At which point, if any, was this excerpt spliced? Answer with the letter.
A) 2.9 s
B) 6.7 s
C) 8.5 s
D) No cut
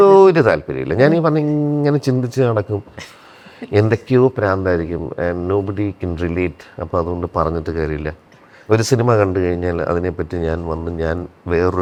D